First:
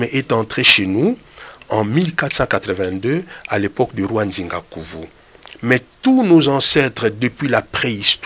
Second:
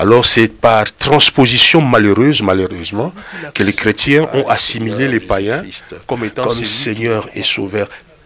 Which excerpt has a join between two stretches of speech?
second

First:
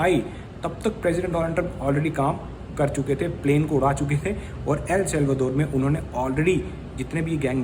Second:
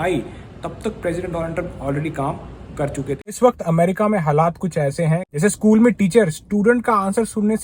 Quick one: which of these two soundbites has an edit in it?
second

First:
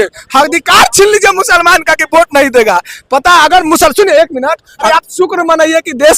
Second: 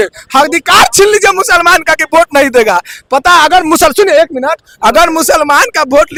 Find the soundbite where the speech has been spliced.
first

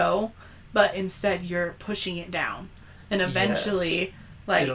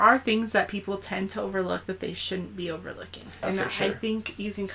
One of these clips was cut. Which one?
second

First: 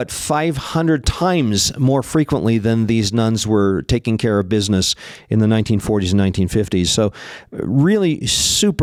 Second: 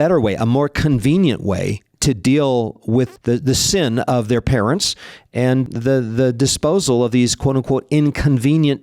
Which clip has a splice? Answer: second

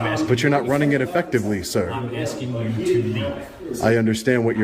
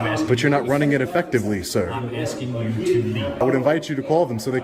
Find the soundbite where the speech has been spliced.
second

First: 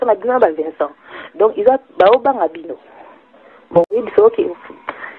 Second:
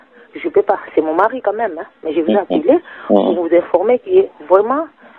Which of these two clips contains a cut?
first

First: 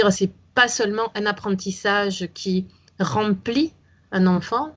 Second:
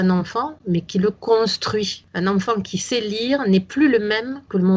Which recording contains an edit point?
second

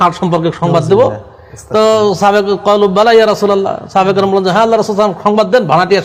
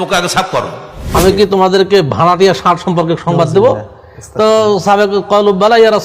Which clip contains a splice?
second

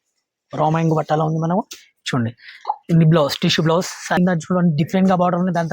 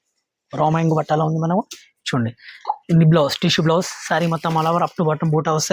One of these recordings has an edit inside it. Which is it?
first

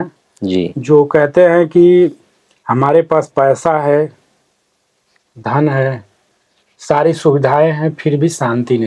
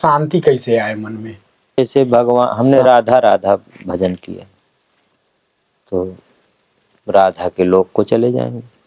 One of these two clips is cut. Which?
second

